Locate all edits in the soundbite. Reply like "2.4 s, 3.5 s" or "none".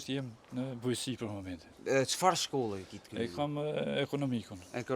none